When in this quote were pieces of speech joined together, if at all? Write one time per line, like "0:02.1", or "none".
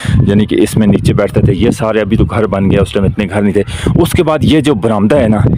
none

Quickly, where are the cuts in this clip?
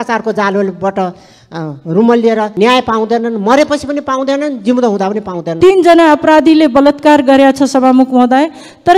0:02.5
0:05.4

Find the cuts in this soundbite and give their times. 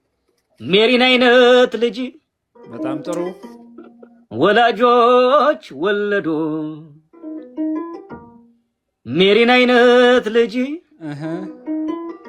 none

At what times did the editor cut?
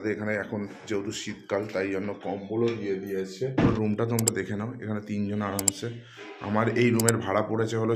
0:03.7

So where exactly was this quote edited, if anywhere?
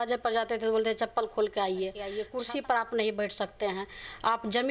0:02.2

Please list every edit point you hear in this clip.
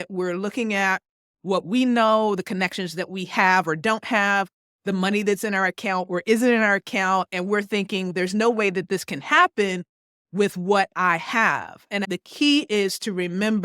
0:12.1

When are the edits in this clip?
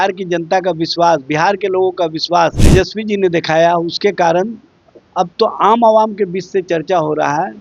0:02.6

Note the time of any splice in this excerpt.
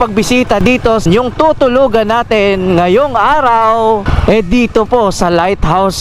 0:01.1
0:04.1

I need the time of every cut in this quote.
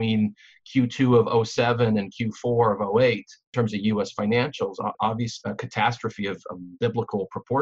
0:03.5
0:04.9

